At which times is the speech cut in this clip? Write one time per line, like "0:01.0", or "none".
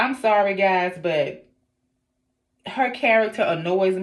none